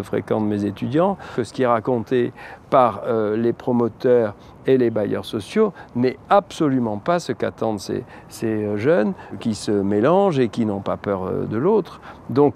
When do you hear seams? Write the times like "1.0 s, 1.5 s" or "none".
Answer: 1.3 s, 9.4 s